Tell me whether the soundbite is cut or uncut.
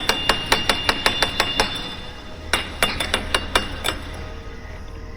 uncut